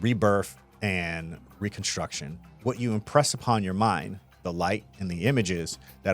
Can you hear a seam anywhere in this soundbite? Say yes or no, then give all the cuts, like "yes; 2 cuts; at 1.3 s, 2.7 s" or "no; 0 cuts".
yes; 1 cut; at 2.4 s